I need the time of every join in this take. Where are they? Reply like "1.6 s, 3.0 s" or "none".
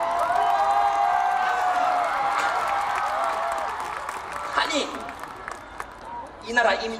6.0 s